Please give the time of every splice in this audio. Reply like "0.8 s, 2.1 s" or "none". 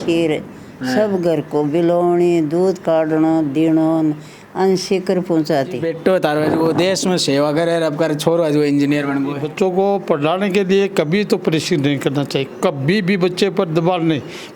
5.9 s, 9.5 s